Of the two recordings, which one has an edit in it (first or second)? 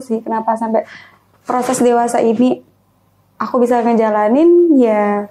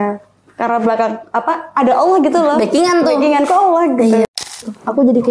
second